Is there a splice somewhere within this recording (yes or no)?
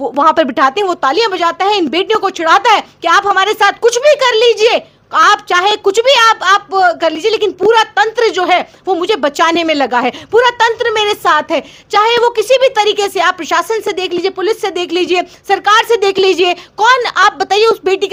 no